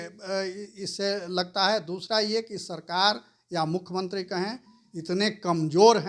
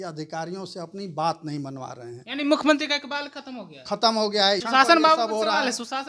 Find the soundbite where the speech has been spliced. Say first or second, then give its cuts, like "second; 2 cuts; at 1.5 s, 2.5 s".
second; 1 cut; at 4.6 s